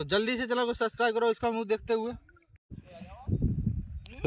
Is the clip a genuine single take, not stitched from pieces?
yes; 0 cuts

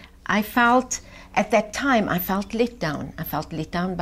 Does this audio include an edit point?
no; 0 cuts

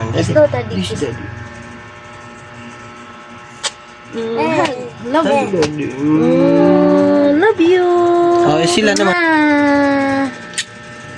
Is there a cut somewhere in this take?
yes; 1 cut; at 9.1 s

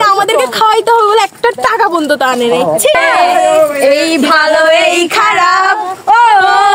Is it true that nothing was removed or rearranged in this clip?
no; 1 cut; at 2.9 s

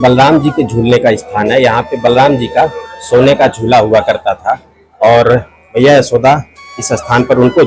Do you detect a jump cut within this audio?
no; 0 cuts

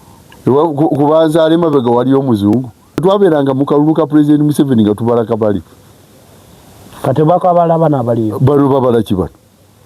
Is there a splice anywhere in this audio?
yes; 1 cut; at 3.0 s

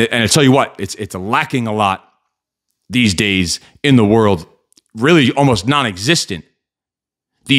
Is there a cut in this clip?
no; 0 cuts

